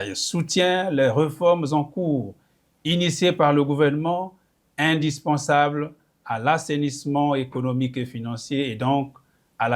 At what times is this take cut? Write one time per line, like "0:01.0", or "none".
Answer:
none